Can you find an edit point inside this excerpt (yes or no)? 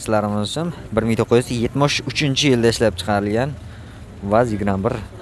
no